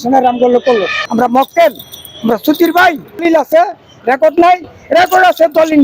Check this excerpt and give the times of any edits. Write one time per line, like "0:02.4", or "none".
0:01.0
0:03.2

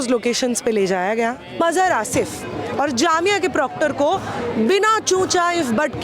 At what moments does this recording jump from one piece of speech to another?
0:01.6

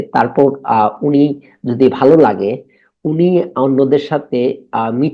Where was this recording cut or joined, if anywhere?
none

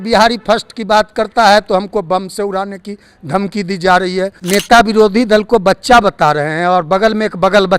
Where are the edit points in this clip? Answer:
0:04.4

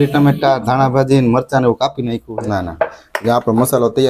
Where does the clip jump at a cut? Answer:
0:02.2

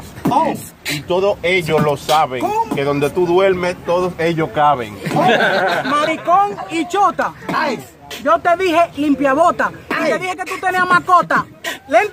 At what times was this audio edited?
none

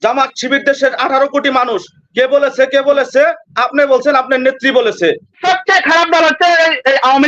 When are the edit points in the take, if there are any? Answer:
0:05.4

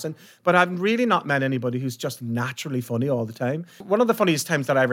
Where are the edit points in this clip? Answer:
0:03.8

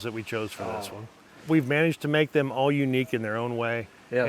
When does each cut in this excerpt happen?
0:01.4

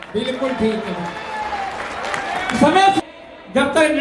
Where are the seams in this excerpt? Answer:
0:03.0

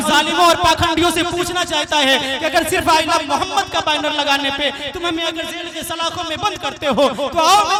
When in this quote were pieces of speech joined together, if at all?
none

